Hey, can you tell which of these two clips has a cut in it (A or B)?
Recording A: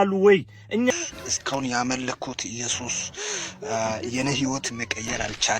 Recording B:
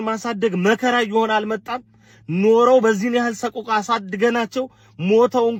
A